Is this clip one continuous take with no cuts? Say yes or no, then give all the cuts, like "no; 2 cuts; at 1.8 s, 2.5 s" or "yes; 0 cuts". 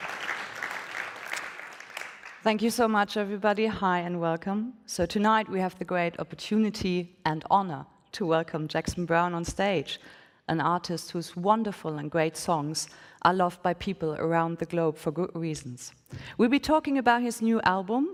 yes; 0 cuts